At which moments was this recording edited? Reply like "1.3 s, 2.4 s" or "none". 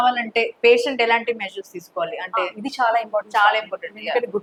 none